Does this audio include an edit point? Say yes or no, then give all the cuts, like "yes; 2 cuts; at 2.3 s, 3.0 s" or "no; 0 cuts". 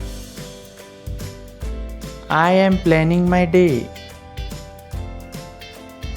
yes; 2 cuts; at 2.2 s, 3.9 s